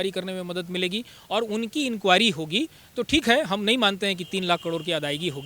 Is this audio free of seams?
yes; 0 cuts

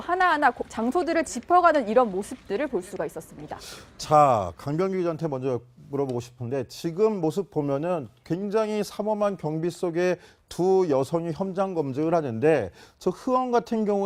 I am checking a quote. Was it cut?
no; 0 cuts

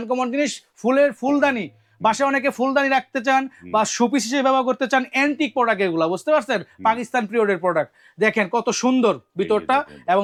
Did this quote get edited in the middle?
no; 0 cuts

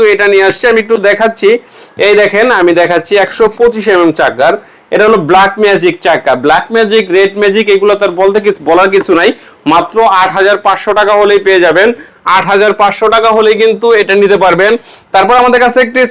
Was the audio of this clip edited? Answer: no; 0 cuts

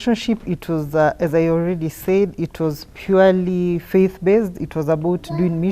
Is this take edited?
no; 0 cuts

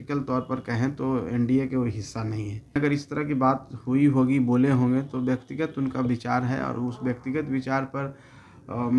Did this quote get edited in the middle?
yes; 1 cut; at 2.8 s

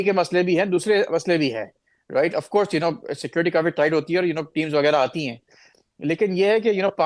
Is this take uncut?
yes; 0 cuts

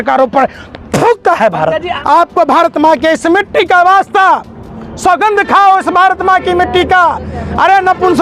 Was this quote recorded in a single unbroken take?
no; 1 cut; at 1.9 s

